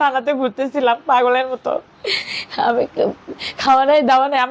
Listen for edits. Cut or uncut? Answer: uncut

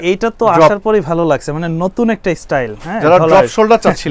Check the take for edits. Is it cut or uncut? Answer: uncut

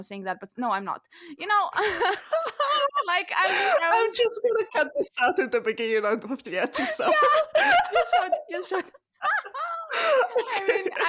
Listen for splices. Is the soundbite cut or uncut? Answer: uncut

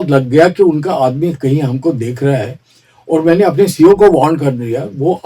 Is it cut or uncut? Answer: uncut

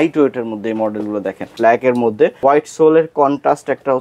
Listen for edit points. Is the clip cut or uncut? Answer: cut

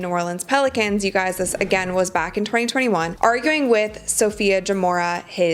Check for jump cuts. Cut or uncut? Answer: uncut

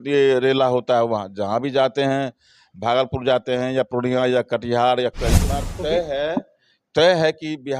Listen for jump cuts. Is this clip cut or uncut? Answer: cut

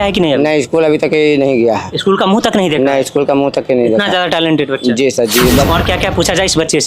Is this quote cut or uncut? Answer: cut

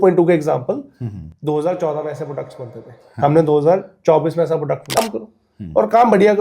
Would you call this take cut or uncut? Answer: cut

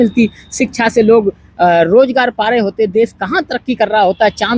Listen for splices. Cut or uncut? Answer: uncut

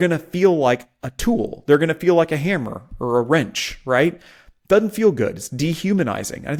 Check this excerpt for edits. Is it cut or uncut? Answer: uncut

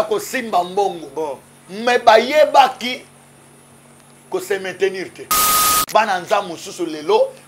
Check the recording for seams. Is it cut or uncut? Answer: cut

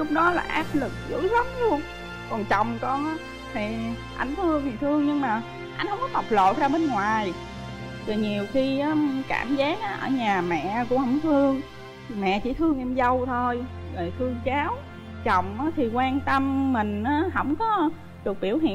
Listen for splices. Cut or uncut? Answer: uncut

